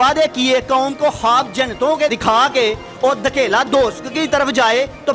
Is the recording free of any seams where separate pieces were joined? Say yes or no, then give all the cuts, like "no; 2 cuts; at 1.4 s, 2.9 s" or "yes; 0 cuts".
no; 1 cut; at 2.1 s